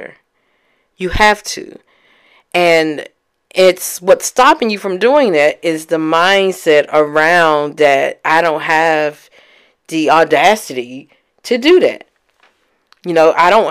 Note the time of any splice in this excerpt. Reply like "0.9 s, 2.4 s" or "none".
none